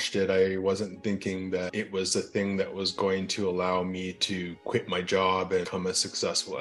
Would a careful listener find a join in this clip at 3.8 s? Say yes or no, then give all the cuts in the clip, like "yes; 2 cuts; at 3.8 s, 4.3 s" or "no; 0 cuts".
no; 2 cuts; at 1.7 s, 5.7 s